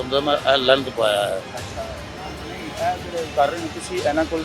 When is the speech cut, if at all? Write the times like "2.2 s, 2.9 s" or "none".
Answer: none